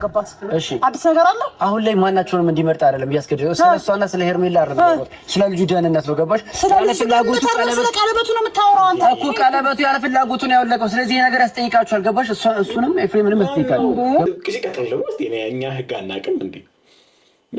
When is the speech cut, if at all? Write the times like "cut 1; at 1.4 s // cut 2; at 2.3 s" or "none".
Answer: cut 1; at 14.3 s